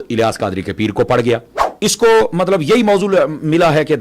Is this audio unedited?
no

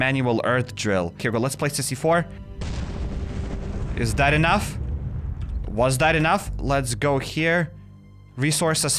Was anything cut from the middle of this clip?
yes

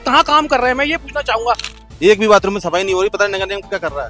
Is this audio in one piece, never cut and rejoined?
no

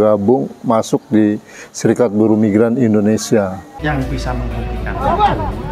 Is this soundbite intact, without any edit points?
no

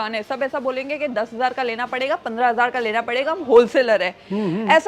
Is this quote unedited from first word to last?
yes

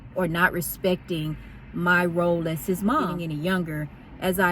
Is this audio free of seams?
no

